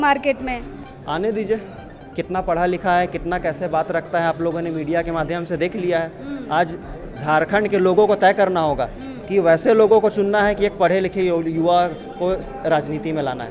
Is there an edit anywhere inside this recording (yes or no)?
no